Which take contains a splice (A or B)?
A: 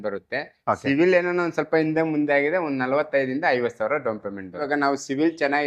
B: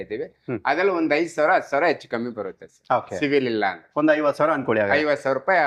A